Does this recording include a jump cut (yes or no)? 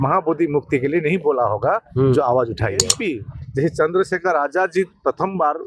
yes